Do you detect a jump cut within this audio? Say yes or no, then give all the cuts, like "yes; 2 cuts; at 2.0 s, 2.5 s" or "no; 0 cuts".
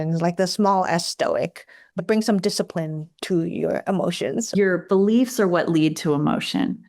yes; 2 cuts; at 2.0 s, 4.5 s